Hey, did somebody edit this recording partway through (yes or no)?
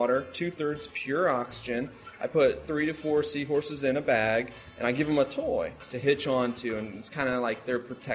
yes